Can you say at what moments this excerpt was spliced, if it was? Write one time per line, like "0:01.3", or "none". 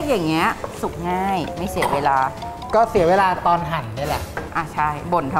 0:04.4